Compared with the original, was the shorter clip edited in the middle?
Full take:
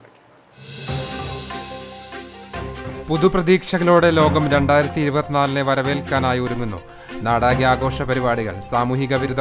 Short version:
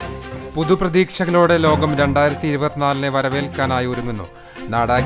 no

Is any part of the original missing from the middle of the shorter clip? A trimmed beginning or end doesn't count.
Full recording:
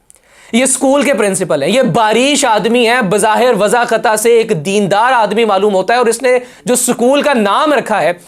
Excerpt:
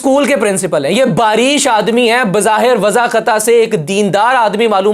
no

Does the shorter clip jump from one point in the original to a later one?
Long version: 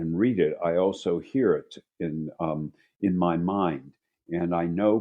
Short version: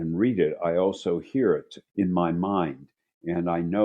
yes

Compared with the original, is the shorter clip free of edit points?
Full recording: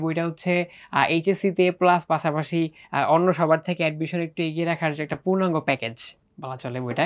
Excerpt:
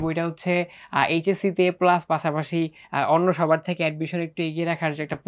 yes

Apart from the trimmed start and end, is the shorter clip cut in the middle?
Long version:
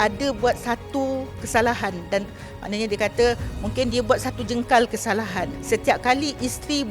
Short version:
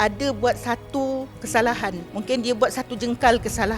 yes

